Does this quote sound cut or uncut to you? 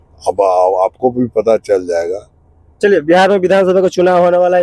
uncut